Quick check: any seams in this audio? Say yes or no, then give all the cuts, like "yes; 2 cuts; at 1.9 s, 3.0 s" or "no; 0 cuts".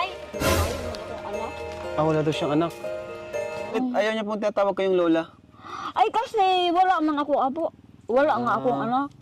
yes; 1 cut; at 3.7 s